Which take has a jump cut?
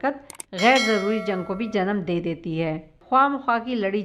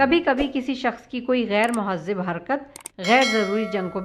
first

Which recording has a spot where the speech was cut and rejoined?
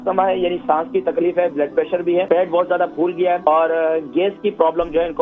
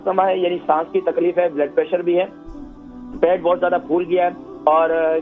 first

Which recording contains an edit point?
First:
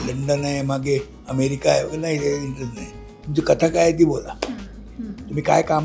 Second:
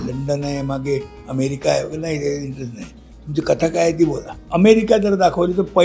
second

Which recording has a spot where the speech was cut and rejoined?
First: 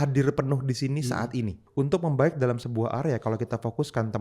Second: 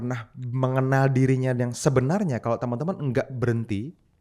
first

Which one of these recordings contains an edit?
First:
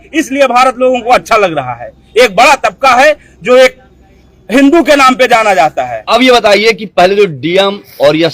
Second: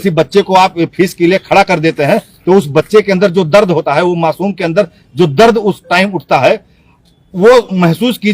first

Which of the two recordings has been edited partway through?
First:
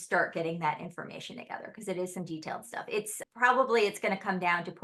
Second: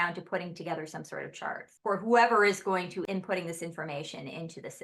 second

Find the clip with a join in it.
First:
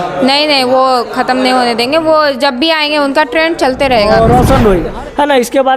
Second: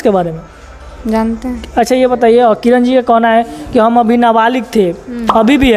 first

